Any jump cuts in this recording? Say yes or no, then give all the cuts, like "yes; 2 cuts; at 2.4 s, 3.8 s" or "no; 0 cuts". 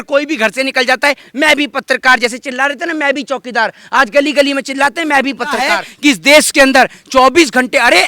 yes; 1 cut; at 5.8 s